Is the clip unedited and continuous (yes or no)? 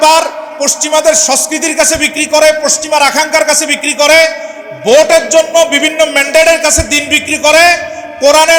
yes